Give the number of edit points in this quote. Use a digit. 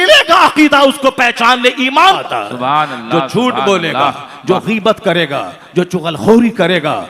1